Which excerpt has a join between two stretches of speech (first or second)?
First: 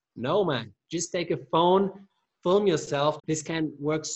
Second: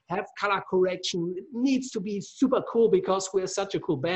first